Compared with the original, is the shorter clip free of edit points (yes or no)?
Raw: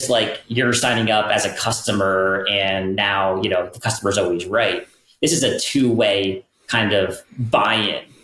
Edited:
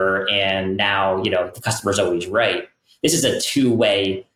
yes